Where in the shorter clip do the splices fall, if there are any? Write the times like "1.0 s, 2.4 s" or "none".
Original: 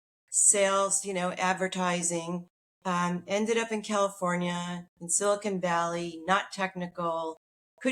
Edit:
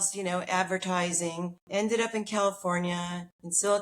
1.7 s